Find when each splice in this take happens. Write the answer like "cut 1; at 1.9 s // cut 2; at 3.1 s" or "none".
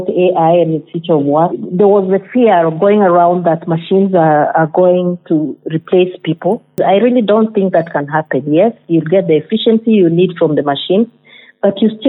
cut 1; at 1.6 s // cut 2; at 6.8 s